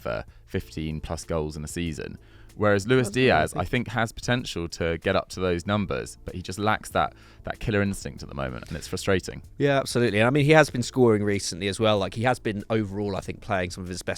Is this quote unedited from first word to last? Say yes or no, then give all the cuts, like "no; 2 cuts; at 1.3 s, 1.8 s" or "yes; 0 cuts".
yes; 0 cuts